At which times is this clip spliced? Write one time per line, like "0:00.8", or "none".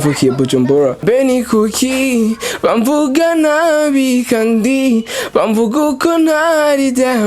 0:01.0